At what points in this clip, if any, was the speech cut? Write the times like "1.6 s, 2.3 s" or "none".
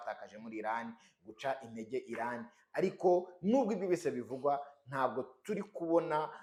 none